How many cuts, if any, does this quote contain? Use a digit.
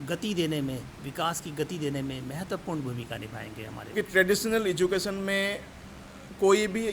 1